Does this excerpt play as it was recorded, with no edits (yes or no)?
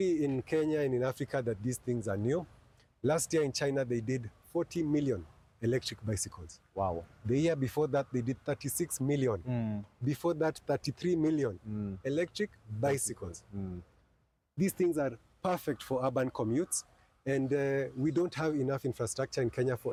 yes